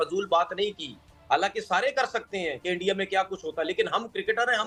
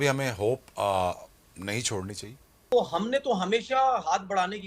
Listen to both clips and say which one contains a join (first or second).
second